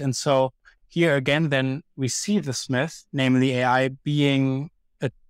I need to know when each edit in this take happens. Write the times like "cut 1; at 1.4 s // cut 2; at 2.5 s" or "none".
cut 1; at 3.0 s